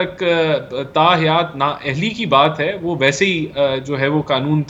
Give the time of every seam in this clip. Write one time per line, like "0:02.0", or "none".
none